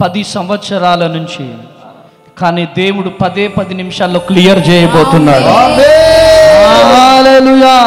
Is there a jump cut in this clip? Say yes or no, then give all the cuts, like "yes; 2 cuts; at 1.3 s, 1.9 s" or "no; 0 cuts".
no; 0 cuts